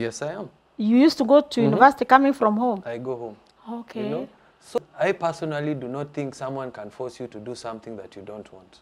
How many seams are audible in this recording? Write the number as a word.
one